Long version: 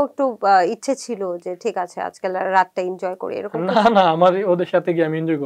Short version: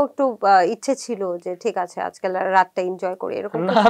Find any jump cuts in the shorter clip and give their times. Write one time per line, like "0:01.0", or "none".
none